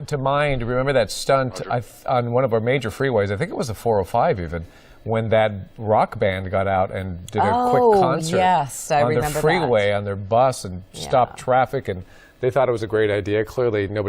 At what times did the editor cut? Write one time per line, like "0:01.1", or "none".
0:12.7